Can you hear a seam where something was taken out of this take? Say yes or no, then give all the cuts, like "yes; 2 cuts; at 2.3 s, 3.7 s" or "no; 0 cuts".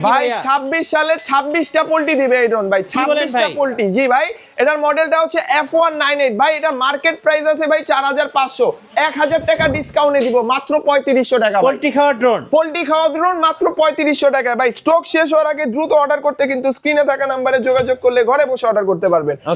no; 0 cuts